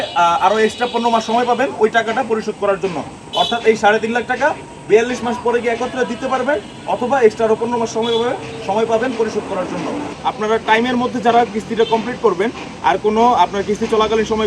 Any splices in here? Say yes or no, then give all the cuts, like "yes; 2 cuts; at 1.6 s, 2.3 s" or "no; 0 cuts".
yes; 1 cut; at 10.2 s